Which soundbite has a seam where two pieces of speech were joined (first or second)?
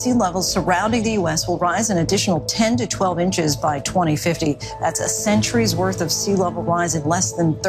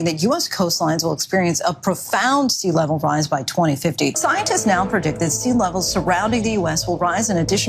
second